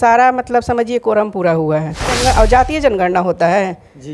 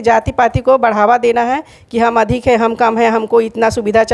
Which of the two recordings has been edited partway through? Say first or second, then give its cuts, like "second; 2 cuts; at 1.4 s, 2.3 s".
first; 1 cut; at 2.1 s